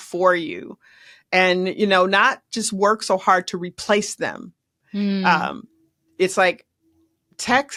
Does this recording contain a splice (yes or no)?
no